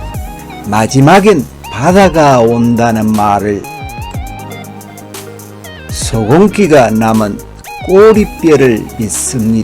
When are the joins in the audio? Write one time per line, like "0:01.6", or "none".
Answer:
0:03.6
0:06.0